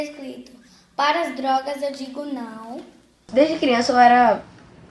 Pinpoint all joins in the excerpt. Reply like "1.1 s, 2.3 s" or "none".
3.3 s